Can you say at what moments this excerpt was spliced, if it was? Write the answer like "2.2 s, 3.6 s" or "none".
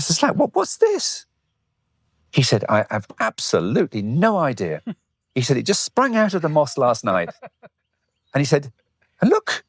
none